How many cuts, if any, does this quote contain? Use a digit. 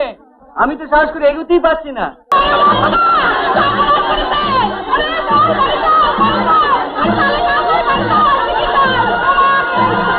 1